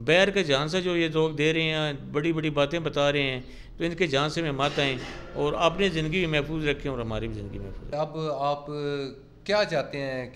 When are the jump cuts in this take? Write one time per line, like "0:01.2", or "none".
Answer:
none